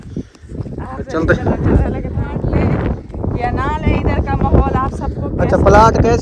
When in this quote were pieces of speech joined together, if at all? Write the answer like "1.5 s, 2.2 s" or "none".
2.8 s